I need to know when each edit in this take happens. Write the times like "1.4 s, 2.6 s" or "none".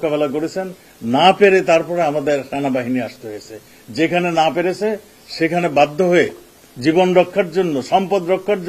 none